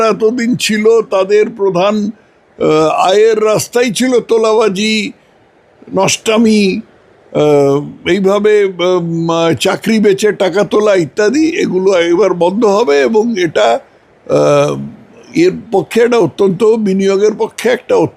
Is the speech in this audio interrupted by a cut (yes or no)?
no